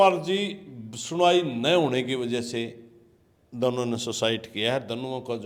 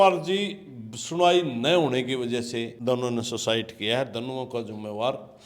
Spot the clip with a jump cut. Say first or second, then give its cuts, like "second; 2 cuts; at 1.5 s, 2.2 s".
second; 1 cut; at 2.7 s